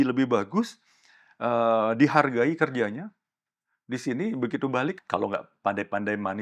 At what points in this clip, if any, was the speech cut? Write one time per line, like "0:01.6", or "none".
0:05.0